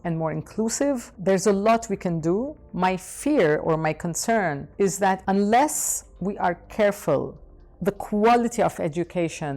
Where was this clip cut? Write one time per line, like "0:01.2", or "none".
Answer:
0:01.1
0:05.1